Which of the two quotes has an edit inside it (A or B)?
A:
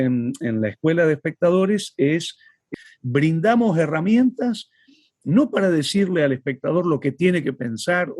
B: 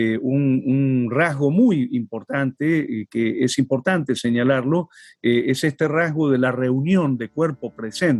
A